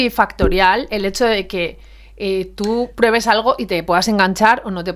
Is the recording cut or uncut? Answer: uncut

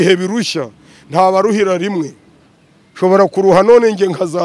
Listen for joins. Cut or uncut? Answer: uncut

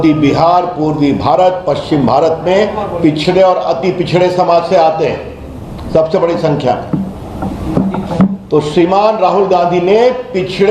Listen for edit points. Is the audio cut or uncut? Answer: uncut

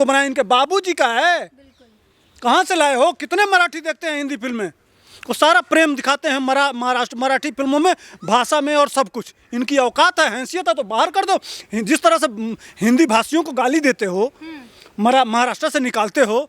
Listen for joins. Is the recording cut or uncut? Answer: uncut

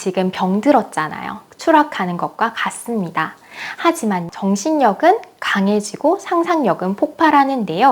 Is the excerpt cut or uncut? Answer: cut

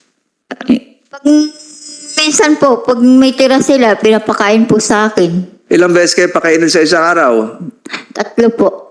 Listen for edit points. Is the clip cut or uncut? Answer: uncut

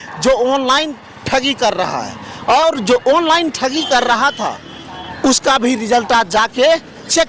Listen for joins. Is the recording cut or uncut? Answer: uncut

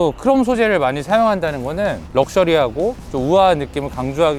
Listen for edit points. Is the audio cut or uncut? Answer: uncut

